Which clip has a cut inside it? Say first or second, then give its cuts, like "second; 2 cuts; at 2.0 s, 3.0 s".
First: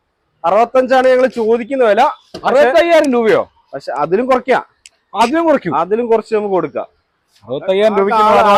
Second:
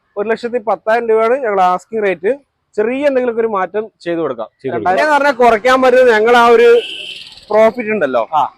second; 1 cut; at 5.0 s